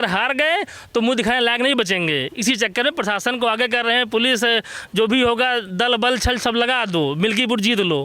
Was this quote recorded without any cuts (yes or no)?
yes